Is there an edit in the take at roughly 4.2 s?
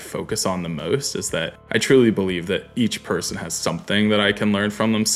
no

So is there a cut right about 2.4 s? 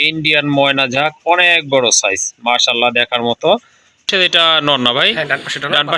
no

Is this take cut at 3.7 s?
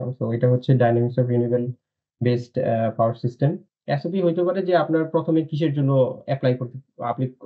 yes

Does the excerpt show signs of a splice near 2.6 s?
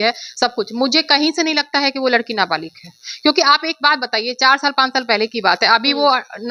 no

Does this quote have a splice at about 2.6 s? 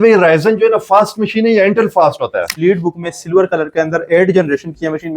yes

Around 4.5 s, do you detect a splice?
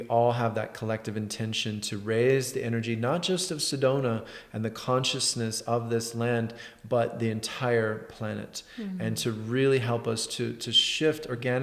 no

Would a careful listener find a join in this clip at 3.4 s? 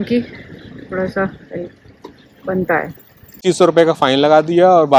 yes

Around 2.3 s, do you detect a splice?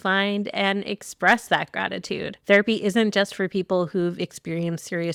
no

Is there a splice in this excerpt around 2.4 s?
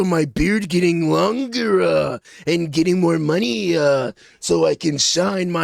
no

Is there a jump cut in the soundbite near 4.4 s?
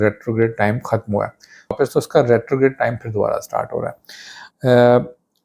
yes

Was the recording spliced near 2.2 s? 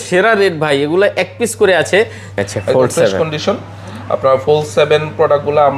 yes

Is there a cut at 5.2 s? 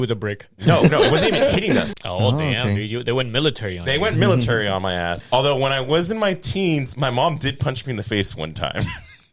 yes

